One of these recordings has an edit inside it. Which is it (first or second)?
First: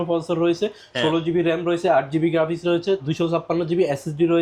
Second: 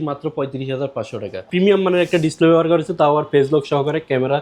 second